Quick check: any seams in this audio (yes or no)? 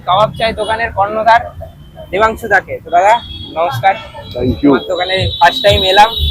no